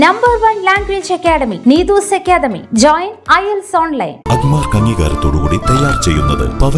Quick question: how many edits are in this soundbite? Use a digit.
0